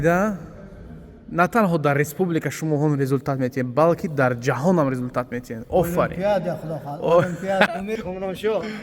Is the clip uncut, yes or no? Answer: no